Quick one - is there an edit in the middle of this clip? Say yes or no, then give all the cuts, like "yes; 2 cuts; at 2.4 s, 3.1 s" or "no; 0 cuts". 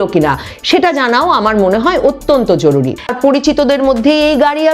yes; 1 cut; at 3.1 s